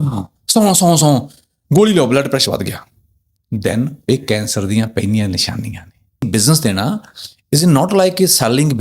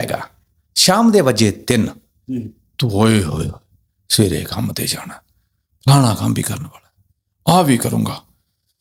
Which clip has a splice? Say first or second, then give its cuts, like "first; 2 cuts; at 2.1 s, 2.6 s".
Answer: first; 1 cut; at 6.2 s